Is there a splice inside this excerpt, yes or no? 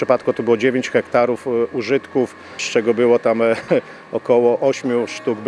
yes